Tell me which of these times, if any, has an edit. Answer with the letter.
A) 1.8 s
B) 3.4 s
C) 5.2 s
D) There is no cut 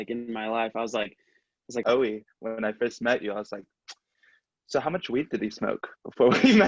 A